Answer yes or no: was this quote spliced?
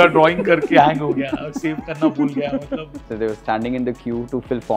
yes